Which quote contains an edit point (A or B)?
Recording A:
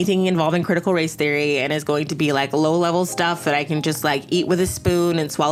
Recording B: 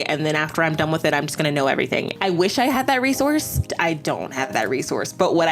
B